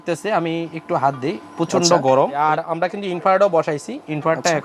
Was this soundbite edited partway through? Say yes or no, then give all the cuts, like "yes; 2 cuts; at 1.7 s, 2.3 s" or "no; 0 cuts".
yes; 1 cut; at 2.4 s